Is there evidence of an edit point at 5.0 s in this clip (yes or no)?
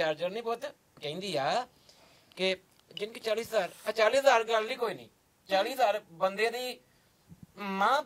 no